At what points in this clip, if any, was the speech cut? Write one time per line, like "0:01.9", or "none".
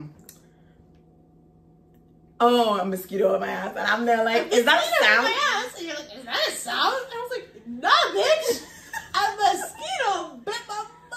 none